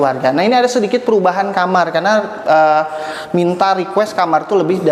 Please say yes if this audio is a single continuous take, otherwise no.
yes